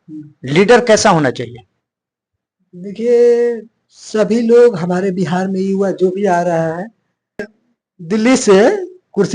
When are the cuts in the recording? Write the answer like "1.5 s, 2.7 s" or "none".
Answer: 7.5 s